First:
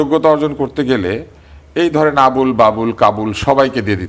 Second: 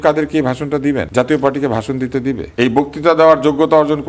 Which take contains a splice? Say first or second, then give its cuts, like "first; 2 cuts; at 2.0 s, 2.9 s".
second; 2 cuts; at 1.1 s, 2.5 s